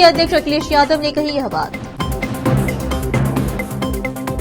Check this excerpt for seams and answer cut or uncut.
uncut